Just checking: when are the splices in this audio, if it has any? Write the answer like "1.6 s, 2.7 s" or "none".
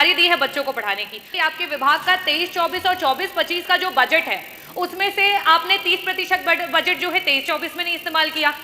1.3 s